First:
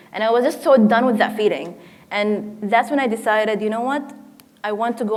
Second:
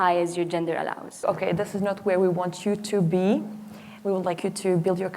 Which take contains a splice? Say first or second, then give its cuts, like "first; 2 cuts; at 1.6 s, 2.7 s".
second; 1 cut; at 1.2 s